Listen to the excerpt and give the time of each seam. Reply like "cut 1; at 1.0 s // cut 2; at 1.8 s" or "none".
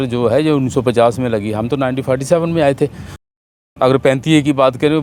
none

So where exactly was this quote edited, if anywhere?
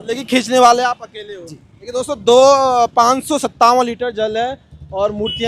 none

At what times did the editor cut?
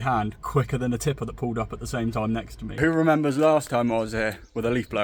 cut 1; at 2.8 s

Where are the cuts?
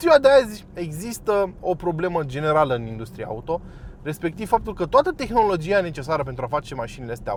none

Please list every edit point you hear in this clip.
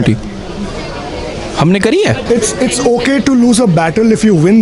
cut 1; at 2.2 s

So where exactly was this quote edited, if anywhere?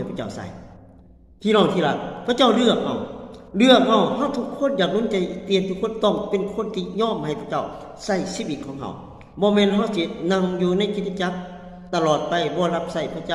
none

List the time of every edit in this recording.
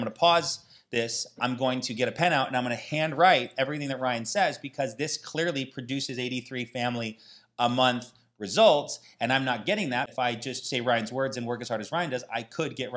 cut 1; at 10.1 s

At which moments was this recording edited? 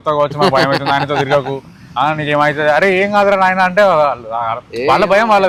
none

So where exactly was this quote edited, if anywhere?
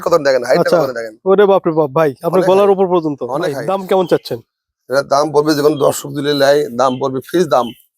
cut 1; at 3.6 s

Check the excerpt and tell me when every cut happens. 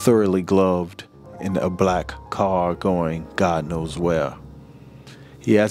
none

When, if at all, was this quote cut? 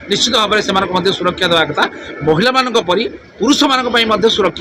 none

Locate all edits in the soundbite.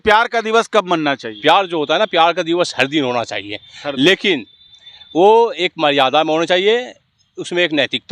cut 1; at 1.3 s

